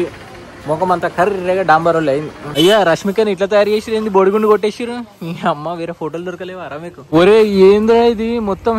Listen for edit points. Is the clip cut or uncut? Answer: cut